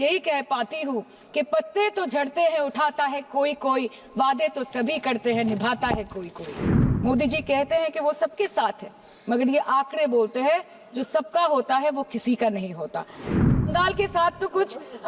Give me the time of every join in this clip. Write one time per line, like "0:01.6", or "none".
0:06.5